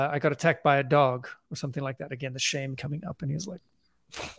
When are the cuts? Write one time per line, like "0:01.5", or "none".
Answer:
none